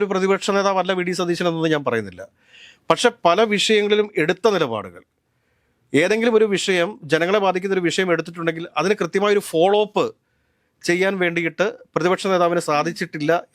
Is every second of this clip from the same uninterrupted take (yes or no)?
yes